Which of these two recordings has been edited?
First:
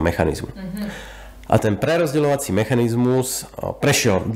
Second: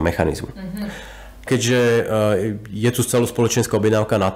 second; 1 cut; at 1.5 s

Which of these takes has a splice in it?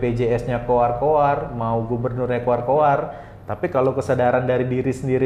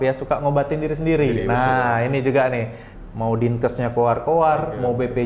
second; 1 cut; at 2.9 s

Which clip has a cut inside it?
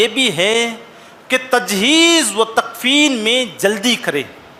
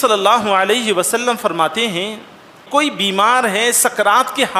second; 1 cut; at 2.6 s

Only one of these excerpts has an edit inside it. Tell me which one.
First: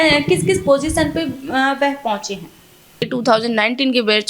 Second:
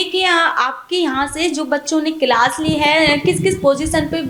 first; 1 cut; at 3.0 s

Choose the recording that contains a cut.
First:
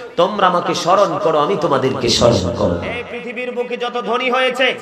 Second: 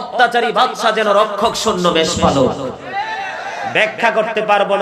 first; 1 cut; at 2.9 s

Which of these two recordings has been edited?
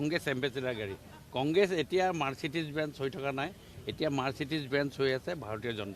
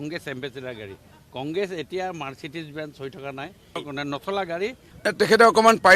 second; 2 cuts; at 3.9 s, 4.9 s

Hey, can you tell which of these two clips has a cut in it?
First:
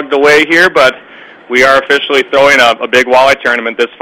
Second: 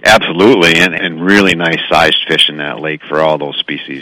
second; 1 cut; at 1.0 s

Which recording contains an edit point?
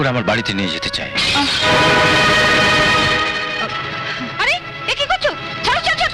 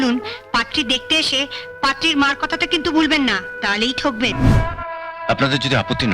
second; 1 cut; at 4.3 s

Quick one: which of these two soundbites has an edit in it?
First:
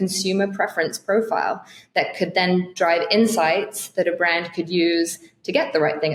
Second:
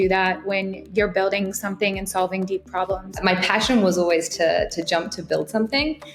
second; 1 cut; at 3.2 s

